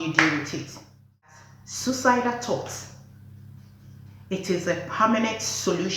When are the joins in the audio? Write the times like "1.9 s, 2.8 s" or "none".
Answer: 1.3 s